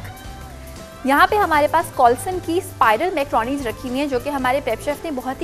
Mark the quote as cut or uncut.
uncut